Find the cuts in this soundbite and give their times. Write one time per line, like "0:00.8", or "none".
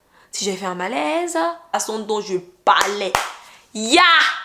0:01.7